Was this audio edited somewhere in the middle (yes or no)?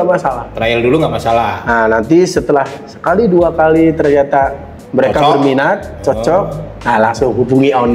no